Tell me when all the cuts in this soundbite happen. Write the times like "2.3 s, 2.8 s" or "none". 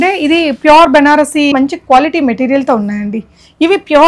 1.5 s